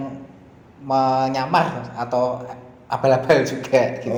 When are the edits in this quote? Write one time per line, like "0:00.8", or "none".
none